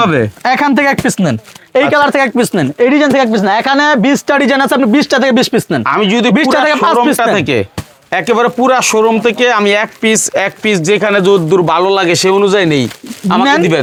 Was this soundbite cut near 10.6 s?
no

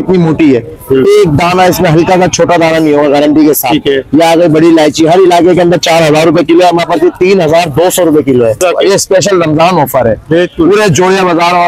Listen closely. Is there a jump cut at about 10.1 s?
no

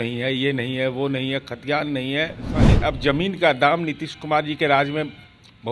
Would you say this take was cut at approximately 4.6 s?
no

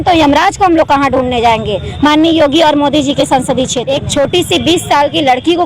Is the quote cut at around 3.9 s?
yes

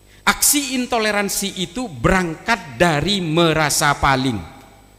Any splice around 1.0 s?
no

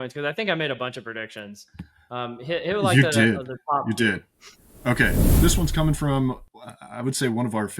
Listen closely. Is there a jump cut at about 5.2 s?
yes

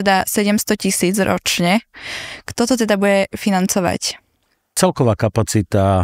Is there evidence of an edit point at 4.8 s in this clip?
yes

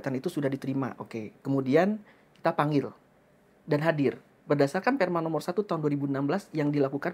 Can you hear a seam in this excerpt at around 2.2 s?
no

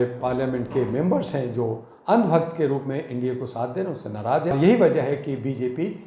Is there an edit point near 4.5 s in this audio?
yes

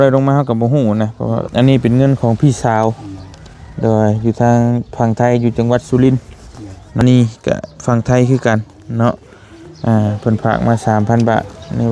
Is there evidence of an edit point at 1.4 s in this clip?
yes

